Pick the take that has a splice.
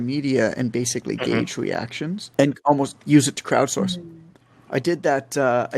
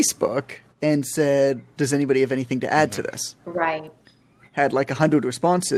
first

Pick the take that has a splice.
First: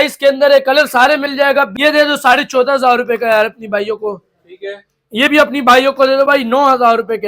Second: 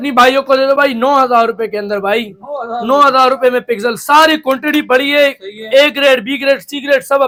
first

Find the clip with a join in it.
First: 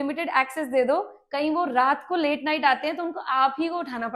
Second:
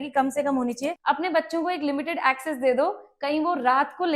second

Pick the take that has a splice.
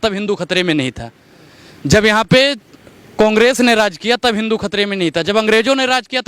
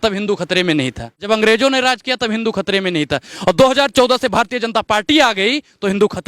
second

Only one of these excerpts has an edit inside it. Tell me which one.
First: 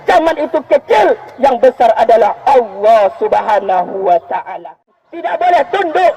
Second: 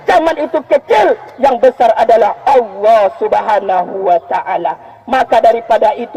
first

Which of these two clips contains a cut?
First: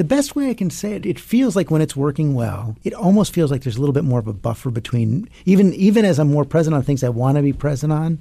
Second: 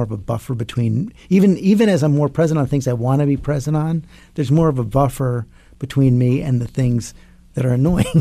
first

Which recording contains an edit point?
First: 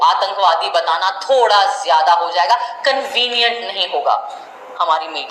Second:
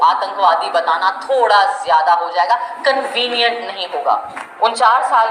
second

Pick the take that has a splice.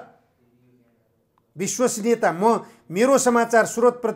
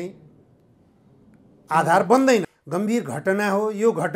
second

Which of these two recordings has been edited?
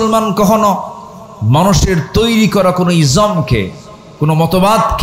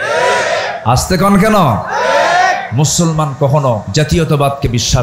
second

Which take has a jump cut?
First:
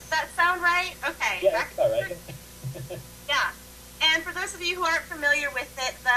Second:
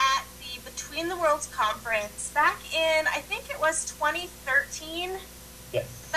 second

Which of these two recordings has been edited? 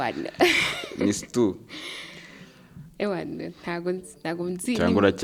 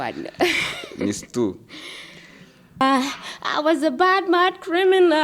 second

